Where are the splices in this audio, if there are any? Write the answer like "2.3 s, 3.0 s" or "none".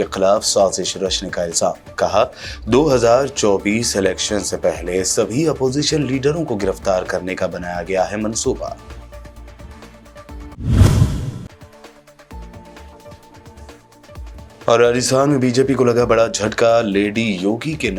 none